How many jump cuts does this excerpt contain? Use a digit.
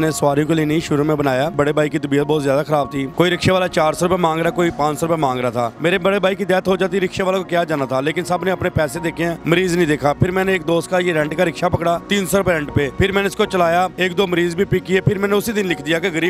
4